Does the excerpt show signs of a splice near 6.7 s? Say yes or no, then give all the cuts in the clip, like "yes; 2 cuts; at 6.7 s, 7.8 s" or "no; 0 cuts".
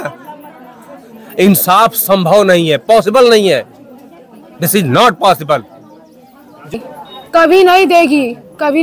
yes; 1 cut; at 6.7 s